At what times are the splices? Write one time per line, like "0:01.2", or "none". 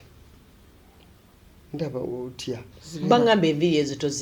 0:02.8